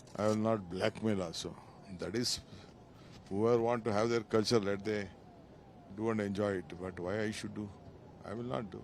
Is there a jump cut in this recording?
no; 0 cuts

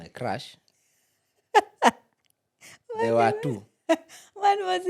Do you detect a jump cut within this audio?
no; 0 cuts

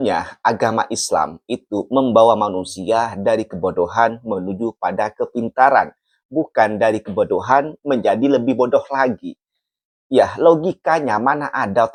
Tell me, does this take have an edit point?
no; 0 cuts

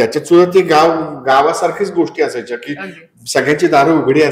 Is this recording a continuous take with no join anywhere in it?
yes; 0 cuts

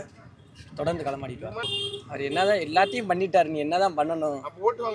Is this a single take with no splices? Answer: no; 1 cut; at 1.6 s

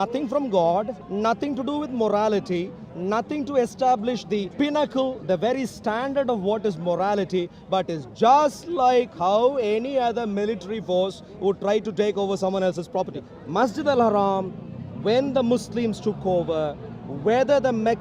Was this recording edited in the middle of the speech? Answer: yes; 3 cuts; at 1.0 s, 4.5 s, 13.2 s

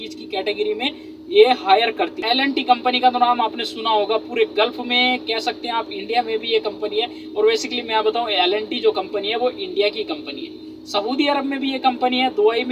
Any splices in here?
yes; 1 cut; at 2.2 s

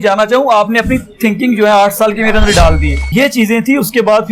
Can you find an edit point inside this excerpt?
yes; 1 cut; at 3.0 s

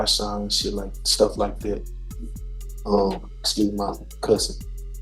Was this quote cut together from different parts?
no; 0 cuts

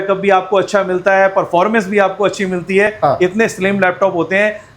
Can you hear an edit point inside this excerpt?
yes; 1 cut; at 2.9 s

